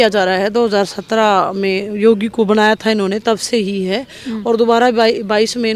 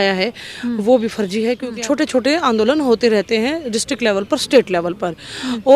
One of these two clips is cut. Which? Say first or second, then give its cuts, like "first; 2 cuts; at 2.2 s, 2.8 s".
second; 1 cut; at 1.7 s